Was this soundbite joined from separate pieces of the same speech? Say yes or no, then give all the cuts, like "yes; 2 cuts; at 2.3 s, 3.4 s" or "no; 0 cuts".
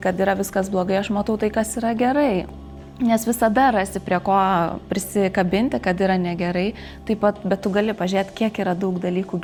no; 0 cuts